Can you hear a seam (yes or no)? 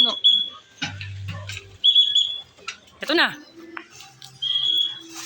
yes